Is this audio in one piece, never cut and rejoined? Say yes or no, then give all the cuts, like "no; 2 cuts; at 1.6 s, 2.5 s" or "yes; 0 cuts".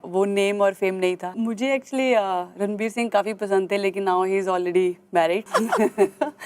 no; 2 cuts; at 1.3 s, 5.4 s